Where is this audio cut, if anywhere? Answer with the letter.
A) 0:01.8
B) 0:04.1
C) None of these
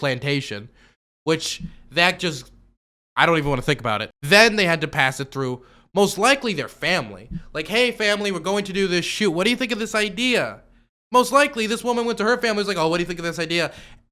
B